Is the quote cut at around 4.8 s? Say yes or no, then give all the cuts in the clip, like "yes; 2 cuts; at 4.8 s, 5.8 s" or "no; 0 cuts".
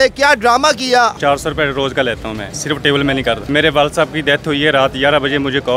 no; 3 cuts; at 1.2 s, 2.5 s, 3.4 s